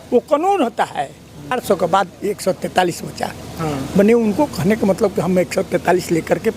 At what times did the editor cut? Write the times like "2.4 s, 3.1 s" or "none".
1.6 s